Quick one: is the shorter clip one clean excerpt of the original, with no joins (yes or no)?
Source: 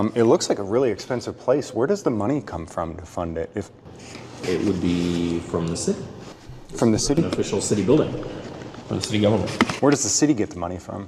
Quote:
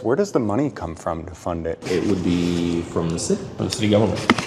no